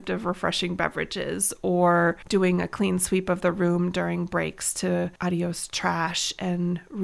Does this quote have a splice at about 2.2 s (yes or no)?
yes